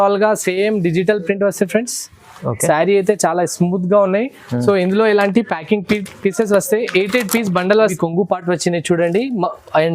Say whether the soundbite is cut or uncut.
cut